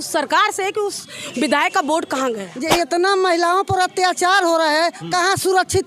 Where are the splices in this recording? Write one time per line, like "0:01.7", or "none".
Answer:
0:02.5